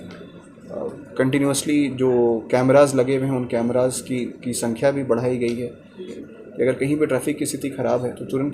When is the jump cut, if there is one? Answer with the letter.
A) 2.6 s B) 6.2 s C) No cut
B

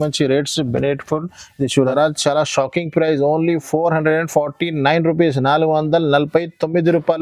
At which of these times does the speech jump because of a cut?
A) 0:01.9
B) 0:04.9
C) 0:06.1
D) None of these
A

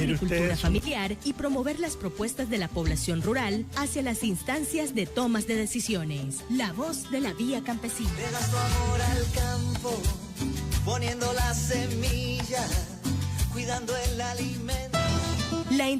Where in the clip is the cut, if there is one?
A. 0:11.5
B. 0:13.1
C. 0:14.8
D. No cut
C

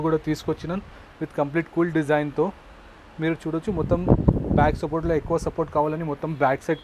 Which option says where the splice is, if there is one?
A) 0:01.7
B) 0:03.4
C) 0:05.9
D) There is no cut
D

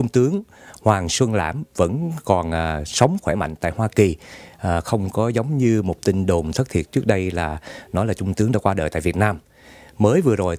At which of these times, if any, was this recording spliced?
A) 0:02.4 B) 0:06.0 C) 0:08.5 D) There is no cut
D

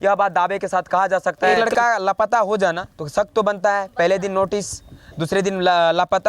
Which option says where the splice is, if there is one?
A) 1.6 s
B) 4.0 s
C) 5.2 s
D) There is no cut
A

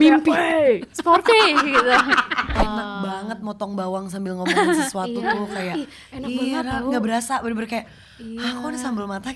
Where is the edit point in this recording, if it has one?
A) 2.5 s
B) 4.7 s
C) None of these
A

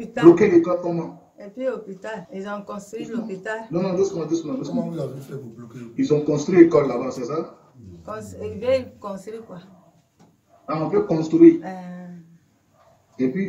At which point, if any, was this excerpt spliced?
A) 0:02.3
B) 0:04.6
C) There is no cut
A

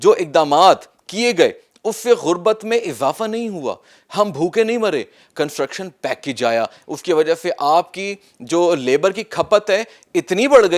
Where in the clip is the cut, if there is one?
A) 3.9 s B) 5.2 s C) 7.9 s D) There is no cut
B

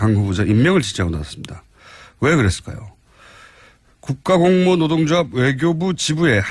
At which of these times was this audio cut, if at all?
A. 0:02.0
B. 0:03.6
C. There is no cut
C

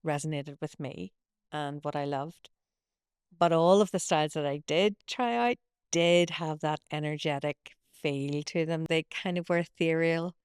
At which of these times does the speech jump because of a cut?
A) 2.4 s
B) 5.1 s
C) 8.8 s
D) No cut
C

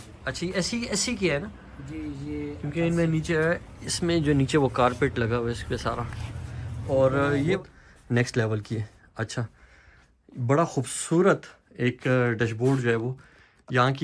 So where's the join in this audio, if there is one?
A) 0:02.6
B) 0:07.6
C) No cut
B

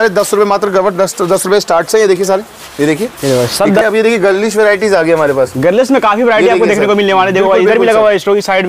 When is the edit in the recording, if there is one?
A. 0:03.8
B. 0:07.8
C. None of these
A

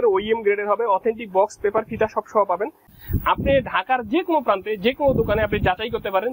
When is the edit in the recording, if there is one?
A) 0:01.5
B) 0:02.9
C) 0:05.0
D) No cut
B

